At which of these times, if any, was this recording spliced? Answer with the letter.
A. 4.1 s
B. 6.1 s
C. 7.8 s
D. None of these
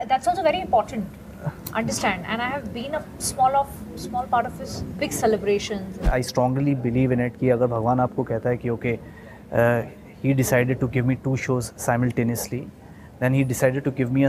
B